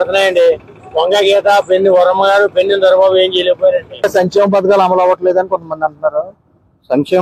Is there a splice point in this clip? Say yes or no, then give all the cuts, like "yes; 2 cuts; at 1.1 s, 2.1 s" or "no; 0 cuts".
yes; 1 cut; at 4.1 s